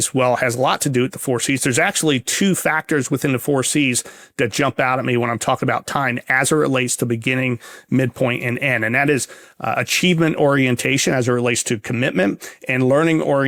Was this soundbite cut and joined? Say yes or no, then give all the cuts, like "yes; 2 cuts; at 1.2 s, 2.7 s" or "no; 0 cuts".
no; 0 cuts